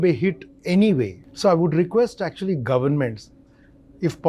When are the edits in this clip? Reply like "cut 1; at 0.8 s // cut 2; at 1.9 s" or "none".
cut 1; at 1.2 s